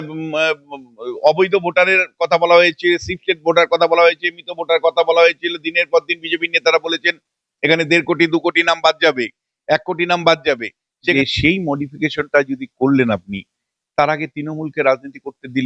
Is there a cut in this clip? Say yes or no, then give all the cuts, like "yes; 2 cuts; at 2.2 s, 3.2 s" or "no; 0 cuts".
yes; 1 cut; at 11.1 s